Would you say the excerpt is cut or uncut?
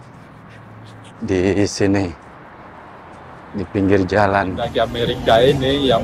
cut